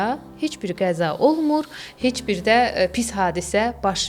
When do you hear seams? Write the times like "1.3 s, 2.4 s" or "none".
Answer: none